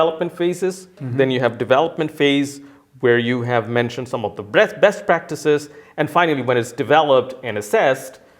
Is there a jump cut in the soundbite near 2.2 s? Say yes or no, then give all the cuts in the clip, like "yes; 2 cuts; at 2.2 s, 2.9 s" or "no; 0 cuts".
no; 1 cut; at 1.0 s